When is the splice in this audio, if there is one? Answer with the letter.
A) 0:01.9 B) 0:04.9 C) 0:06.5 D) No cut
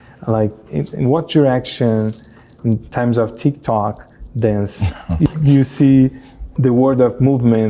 C